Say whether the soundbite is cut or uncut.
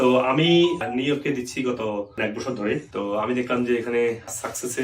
cut